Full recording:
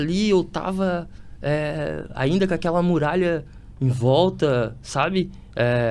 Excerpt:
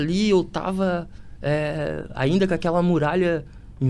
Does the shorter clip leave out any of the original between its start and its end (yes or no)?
no